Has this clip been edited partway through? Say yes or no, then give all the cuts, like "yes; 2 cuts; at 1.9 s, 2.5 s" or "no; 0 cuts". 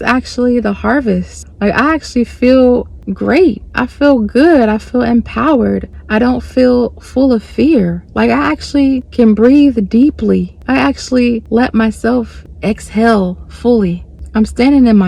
no; 0 cuts